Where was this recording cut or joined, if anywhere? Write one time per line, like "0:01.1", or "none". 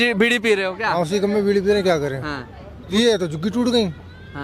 0:02.9